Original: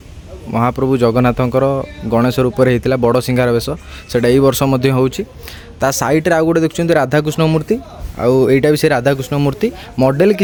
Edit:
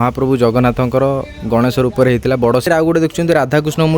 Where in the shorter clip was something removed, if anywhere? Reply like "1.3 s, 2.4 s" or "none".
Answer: 2.6 s